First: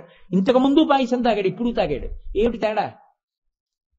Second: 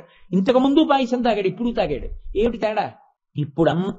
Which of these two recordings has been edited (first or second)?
second